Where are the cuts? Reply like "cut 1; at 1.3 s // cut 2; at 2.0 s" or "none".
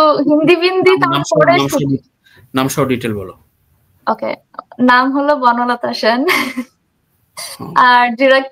none